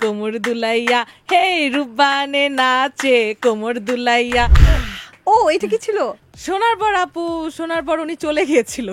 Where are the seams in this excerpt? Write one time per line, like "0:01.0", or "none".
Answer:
0:04.6
0:06.3

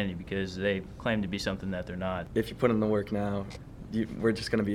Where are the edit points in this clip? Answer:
0:02.2

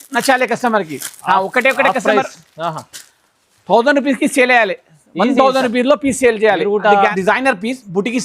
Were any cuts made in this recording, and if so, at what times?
0:07.1

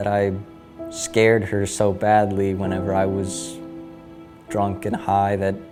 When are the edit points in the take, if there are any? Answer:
none

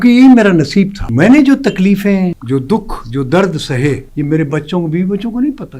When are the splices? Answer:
0:01.0
0:02.4
0:04.1

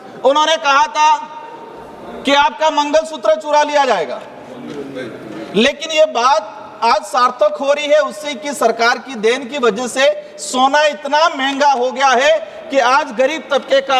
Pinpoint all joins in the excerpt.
none

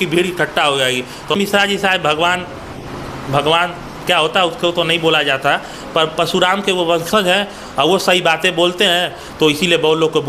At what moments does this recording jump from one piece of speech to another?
0:01.4

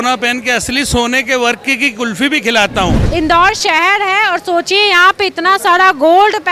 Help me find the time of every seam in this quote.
0:03.0

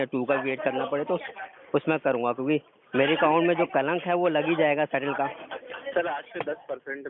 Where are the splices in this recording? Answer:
none

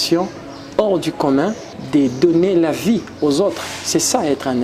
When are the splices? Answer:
0:01.7

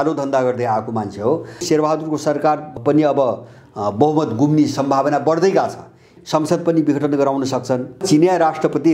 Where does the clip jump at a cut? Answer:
0:01.6
0:02.8
0:06.1
0:08.0

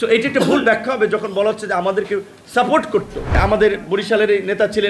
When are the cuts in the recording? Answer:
0:03.4

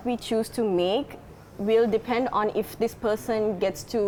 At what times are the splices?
none

